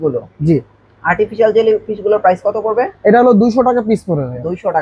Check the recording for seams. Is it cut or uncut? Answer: uncut